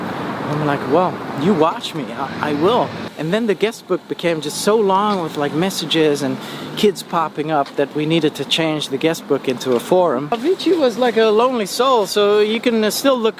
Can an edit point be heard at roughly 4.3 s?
no; 2 cuts; at 3.0 s, 10.3 s

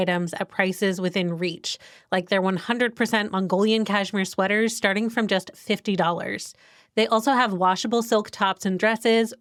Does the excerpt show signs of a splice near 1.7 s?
no; 0 cuts

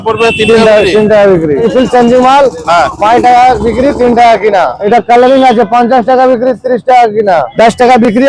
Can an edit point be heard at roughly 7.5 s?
yes; 3 cuts; at 1.7 s, 4.8 s, 7.5 s

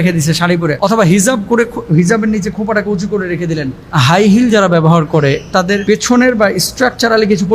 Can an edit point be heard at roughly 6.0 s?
yes; 3 cuts; at 1.1 s, 3.8 s, 6.0 s

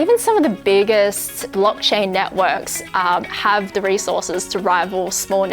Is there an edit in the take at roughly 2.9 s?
no; 1 cut; at 1.5 s

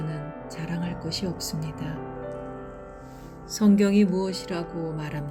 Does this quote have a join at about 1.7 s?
no; 0 cuts

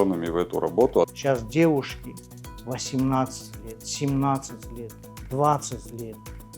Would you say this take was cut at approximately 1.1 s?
yes; 1 cut; at 1.1 s

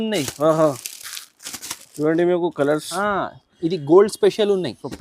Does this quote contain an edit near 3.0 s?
yes; 1 cut; at 3.0 s

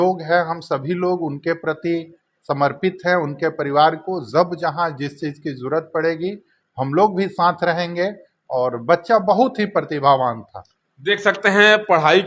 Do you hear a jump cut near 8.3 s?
no; 0 cuts

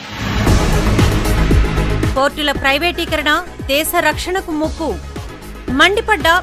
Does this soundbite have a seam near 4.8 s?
no; 1 cut; at 1.9 s

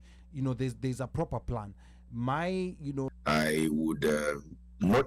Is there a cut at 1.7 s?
no; 1 cut; at 3.1 s

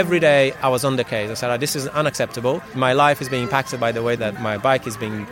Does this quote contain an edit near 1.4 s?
no; 2 cuts; at 2.7 s, 4.2 s

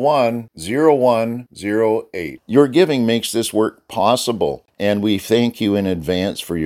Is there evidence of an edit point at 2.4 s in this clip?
no; 1 cut; at 4.7 s

